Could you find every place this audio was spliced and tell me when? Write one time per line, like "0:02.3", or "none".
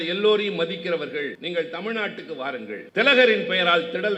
0:01.4
0:02.8